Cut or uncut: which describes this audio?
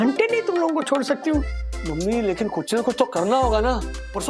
cut